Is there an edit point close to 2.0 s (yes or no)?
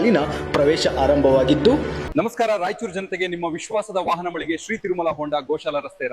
yes